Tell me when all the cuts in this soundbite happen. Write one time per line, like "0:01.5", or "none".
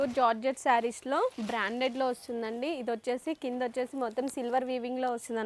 none